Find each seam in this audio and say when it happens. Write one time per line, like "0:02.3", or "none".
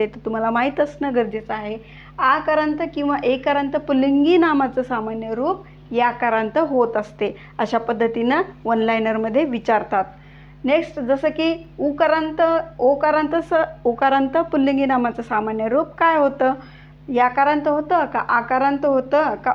none